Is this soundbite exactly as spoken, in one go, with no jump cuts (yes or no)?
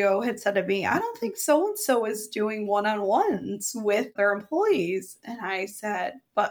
no